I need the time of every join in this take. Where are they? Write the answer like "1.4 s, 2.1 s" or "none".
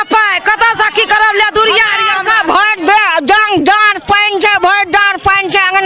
none